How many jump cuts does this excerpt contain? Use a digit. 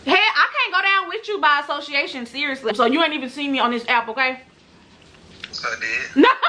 1